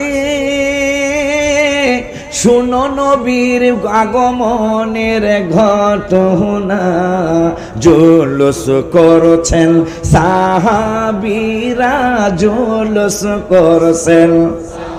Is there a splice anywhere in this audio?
no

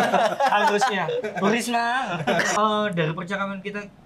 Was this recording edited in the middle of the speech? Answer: yes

